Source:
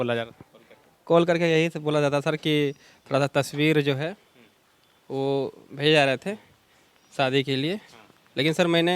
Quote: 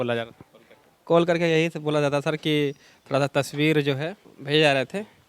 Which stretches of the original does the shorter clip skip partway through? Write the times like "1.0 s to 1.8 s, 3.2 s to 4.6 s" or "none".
4.3 s to 5.6 s